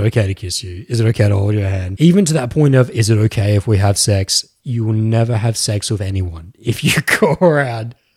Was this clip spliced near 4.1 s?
no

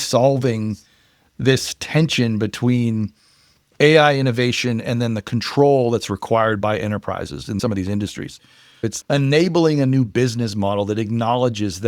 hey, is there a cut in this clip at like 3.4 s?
no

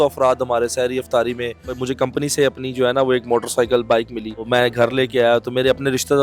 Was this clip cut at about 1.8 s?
yes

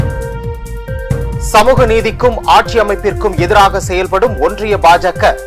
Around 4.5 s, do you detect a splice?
no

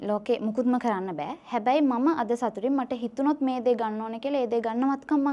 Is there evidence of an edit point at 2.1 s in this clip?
no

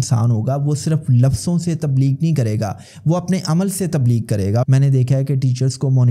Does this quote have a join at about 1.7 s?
no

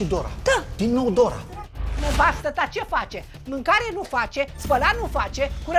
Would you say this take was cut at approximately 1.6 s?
yes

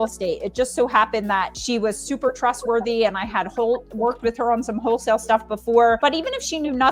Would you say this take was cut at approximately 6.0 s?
yes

